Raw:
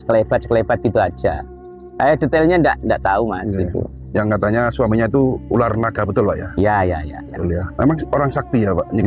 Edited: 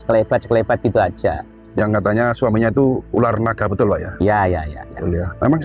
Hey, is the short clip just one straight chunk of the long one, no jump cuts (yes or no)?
no